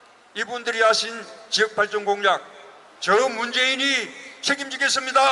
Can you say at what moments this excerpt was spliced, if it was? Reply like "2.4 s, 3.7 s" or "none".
none